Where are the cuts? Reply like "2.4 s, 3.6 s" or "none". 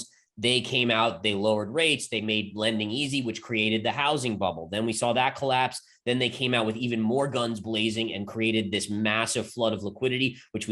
none